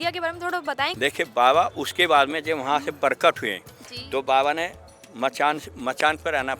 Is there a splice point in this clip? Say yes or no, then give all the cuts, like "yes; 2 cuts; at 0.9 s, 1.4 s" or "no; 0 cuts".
yes; 1 cut; at 0.9 s